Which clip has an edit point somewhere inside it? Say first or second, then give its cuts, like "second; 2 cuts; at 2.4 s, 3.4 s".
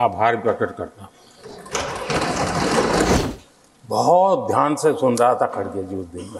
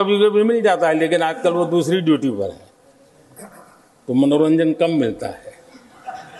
first; 1 cut; at 3.2 s